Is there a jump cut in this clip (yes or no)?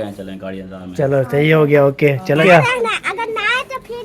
yes